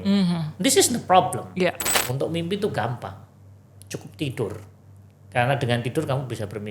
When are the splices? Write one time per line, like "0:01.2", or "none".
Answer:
0:01.9